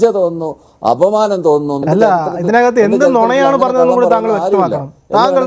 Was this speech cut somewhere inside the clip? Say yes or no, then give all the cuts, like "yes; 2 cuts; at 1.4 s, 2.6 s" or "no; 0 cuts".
yes; 1 cut; at 1.8 s